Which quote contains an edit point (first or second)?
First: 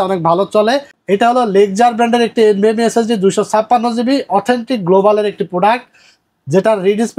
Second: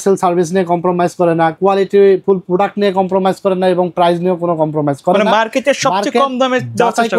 first